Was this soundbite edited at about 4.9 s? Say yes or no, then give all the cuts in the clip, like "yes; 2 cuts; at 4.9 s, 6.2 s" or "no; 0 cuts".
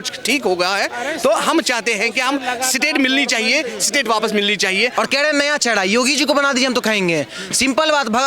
yes; 1 cut; at 4.9 s